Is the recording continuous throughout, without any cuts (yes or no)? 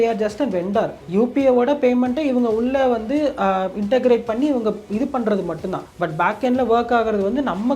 no